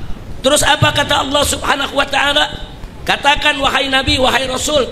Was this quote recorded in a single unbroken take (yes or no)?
no